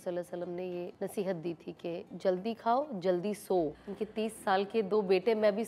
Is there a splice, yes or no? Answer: yes